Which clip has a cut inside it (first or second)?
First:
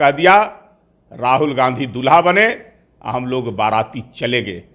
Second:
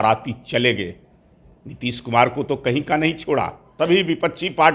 second